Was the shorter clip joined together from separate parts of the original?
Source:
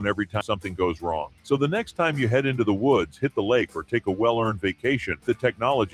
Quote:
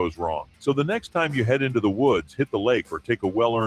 no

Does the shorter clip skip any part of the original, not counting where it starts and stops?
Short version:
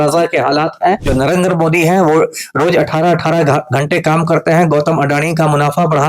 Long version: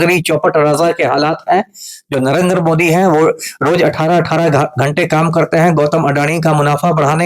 yes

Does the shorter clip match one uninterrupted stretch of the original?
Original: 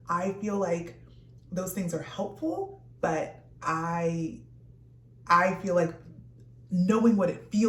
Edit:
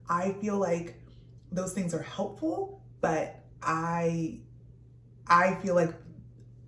yes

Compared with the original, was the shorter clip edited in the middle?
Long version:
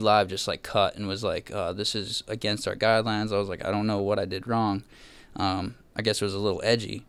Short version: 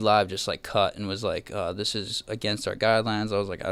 no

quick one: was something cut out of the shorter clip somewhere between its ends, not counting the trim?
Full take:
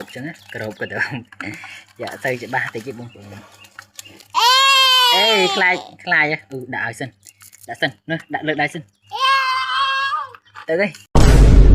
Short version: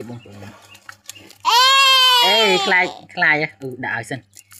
no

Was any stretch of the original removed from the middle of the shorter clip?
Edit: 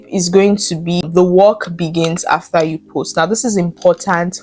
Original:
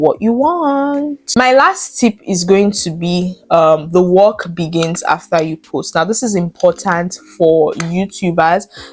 yes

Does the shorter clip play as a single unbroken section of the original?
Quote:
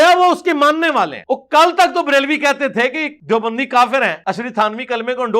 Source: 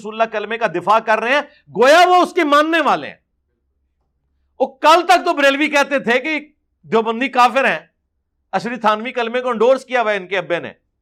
no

